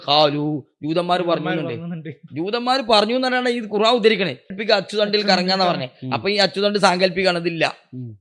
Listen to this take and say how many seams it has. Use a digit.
1